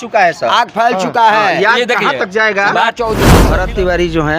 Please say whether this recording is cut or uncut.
cut